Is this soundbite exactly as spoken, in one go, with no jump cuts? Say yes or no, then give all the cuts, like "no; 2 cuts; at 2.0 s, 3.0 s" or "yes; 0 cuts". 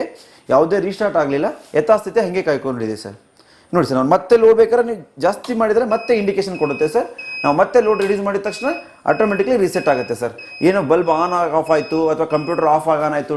yes; 0 cuts